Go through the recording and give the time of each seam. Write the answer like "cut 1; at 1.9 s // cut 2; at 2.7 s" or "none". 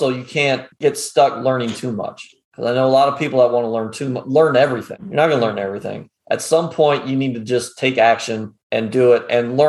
cut 1; at 4.9 s